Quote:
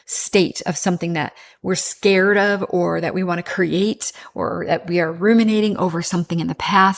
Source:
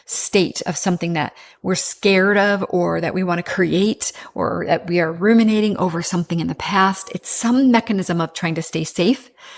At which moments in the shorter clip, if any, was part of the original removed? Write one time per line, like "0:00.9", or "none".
none